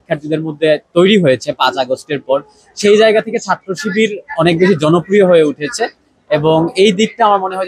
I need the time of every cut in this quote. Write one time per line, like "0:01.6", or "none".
none